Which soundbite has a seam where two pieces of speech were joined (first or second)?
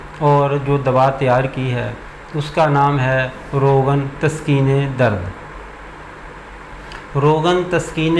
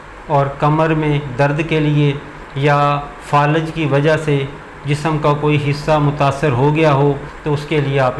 second